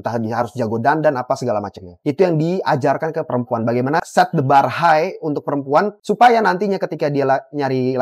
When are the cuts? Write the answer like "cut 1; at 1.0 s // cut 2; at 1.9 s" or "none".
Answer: cut 1; at 1.9 s